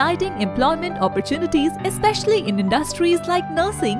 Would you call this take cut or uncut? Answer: uncut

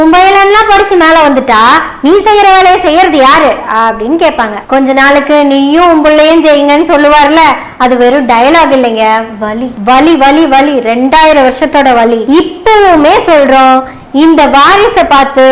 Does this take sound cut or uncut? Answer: cut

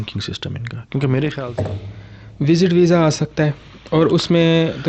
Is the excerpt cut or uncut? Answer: cut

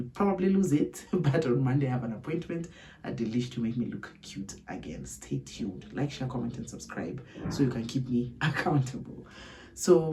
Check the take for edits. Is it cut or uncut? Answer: uncut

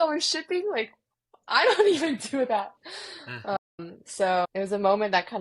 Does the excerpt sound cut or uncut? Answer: cut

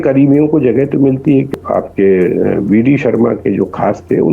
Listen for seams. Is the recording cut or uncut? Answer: cut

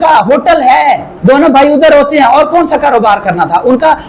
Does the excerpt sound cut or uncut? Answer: cut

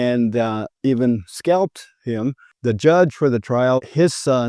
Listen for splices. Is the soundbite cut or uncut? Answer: cut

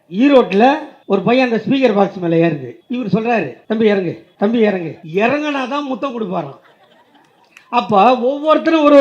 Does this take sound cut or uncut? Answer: cut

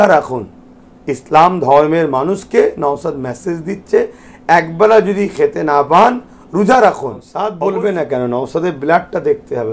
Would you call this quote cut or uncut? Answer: cut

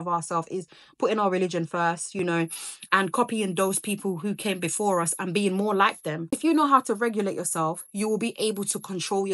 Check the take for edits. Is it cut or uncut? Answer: cut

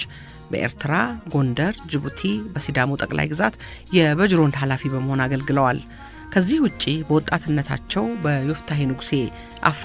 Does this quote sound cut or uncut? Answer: uncut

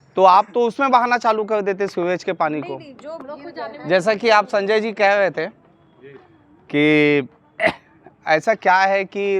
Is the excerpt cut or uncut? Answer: uncut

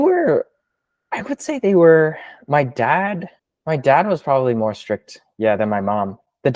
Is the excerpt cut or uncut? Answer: uncut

